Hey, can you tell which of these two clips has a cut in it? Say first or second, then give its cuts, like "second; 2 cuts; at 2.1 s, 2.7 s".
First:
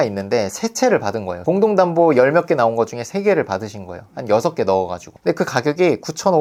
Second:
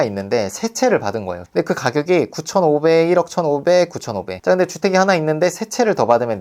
second; 1 cut; at 1.3 s